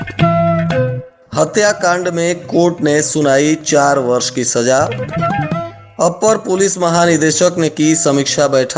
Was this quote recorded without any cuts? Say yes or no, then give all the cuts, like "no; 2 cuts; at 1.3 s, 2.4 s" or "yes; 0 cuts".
no; 1 cut; at 1.1 s